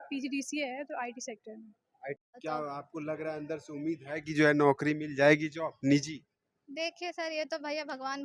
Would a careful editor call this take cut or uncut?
cut